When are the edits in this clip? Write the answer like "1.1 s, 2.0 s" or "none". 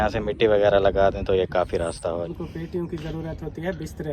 2.3 s

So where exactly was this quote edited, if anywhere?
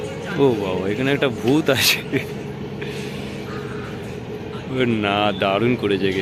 none

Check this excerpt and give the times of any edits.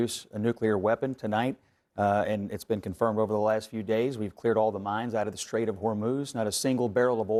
none

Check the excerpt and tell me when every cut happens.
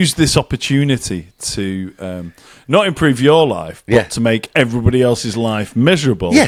none

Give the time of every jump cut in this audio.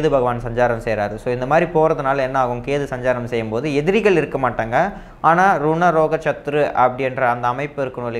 none

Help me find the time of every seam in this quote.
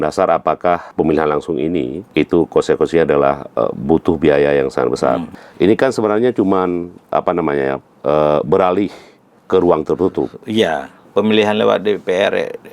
0.9 s, 2.0 s, 5.4 s, 11.0 s

